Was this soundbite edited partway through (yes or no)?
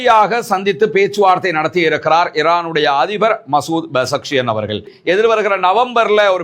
yes